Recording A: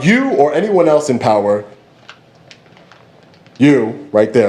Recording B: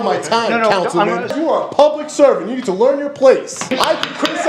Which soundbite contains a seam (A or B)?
B